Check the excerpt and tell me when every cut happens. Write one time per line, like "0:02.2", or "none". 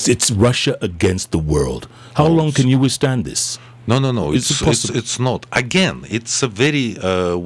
none